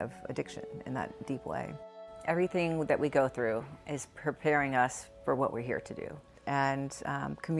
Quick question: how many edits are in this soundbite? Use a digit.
2